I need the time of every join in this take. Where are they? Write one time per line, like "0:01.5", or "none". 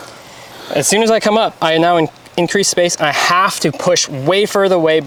none